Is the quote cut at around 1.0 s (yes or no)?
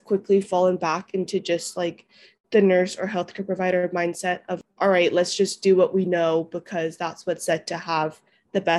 no